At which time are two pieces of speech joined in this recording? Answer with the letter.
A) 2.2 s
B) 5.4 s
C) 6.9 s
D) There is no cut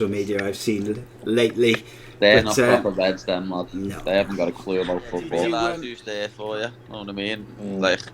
B